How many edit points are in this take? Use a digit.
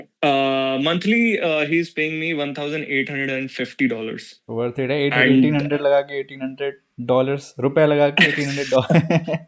0